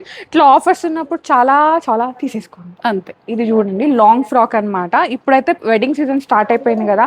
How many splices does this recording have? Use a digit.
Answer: 1